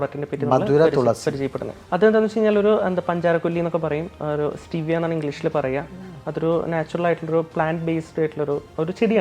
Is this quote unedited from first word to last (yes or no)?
yes